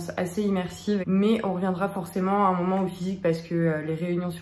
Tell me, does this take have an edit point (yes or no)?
yes